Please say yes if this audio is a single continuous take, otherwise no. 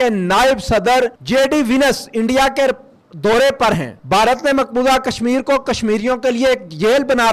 yes